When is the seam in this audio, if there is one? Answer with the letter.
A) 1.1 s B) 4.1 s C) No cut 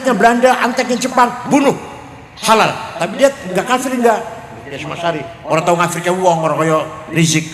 C